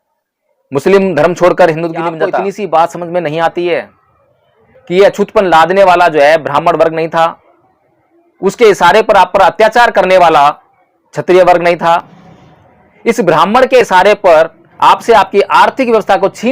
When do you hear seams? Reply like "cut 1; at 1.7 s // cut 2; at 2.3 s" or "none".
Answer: cut 1; at 2.3 s // cut 2; at 14.6 s